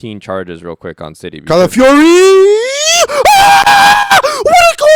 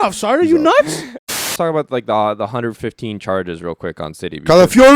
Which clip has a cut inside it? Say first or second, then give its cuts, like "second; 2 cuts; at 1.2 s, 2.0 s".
second; 1 cut; at 1.5 s